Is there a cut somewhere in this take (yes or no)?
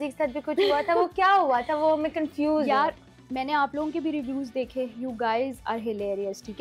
no